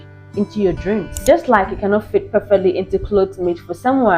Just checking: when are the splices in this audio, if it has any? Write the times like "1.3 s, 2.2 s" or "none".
1.1 s